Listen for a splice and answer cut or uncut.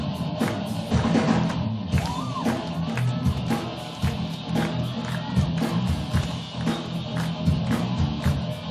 uncut